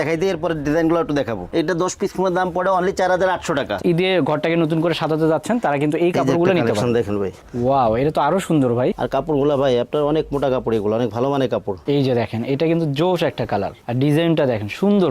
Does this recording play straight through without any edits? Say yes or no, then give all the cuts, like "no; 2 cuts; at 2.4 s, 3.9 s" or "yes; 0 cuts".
no; 4 cuts; at 1.5 s, 3.8 s, 9.0 s, 11.7 s